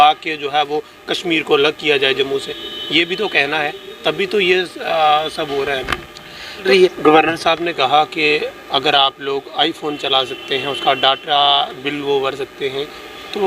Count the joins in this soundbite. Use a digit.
1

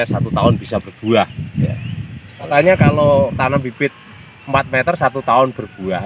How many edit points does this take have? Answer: 1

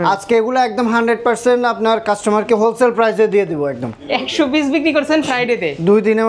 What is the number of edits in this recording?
1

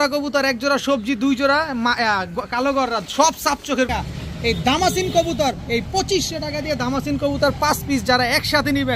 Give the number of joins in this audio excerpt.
1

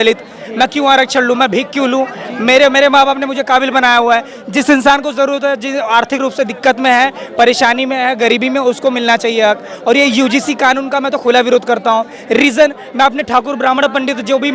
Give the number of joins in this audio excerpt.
0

